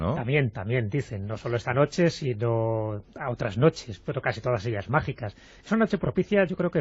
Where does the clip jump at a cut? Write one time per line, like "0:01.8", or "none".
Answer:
none